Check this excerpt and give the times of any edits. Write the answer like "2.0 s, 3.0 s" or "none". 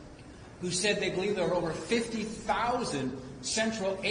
2.9 s

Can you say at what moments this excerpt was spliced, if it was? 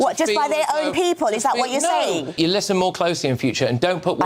2.3 s

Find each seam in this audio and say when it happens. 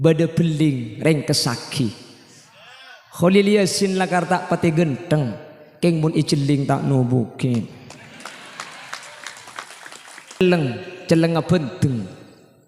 10.4 s

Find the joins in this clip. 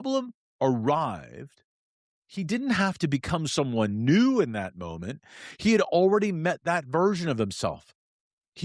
none

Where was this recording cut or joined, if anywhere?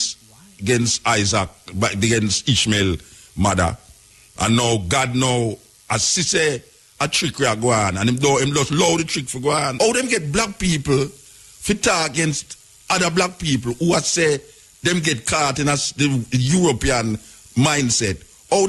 9.7 s

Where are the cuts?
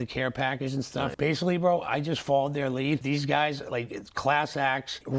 3.0 s

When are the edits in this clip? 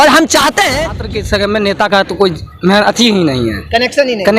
1.0 s

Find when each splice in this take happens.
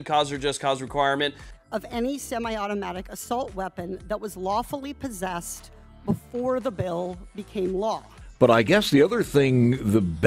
1.4 s, 8.1 s

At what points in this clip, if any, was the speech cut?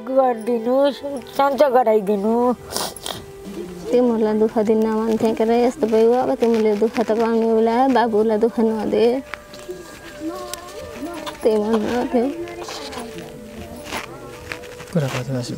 3.4 s

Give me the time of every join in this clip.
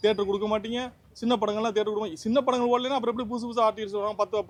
none

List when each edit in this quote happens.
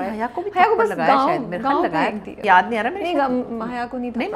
2.4 s

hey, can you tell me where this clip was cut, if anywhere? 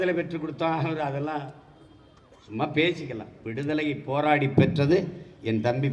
none

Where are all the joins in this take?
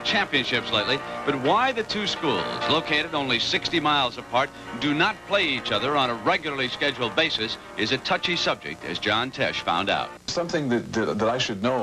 8.9 s

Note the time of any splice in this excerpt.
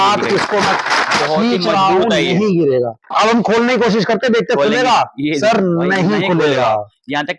3.1 s

